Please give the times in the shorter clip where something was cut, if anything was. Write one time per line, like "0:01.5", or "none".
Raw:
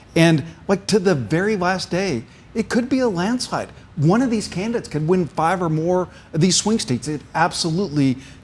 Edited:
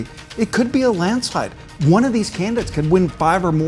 none